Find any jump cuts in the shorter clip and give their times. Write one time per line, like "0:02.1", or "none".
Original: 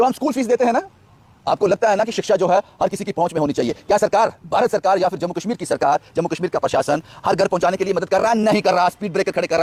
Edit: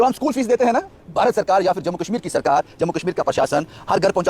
0:01.0